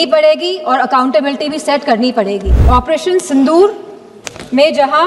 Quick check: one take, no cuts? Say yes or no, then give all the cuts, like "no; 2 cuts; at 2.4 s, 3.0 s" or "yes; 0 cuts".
no; 1 cut; at 2.5 s